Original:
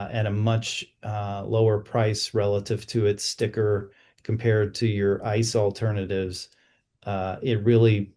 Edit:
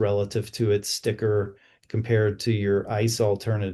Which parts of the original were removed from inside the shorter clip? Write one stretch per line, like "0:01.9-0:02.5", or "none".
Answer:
none